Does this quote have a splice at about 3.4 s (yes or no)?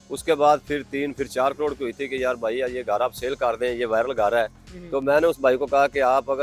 no